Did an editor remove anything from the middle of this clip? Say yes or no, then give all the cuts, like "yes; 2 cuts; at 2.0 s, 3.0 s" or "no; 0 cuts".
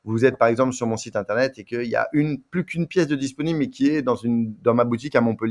no; 0 cuts